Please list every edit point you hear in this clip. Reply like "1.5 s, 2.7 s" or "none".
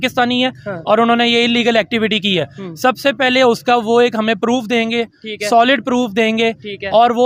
none